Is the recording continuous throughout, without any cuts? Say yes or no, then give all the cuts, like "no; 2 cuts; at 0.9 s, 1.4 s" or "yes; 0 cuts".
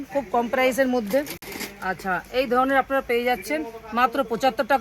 yes; 0 cuts